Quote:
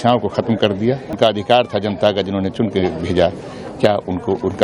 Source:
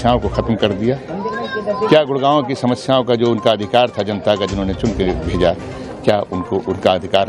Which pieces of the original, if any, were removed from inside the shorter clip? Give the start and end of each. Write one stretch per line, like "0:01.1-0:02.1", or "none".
0:01.1-0:03.4